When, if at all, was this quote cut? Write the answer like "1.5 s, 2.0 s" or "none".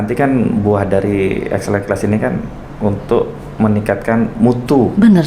none